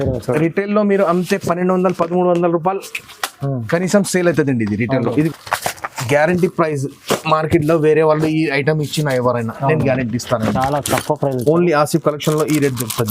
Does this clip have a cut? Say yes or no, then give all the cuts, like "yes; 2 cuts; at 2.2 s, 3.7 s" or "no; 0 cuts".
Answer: yes; 1 cut; at 5.3 s